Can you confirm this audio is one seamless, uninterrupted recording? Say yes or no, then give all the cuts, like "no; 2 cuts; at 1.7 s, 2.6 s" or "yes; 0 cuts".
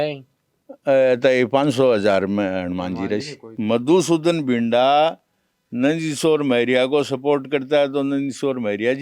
no; 1 cut; at 3.4 s